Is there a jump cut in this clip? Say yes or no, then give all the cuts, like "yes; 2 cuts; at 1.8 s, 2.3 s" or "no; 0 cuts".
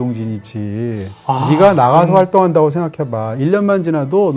no; 0 cuts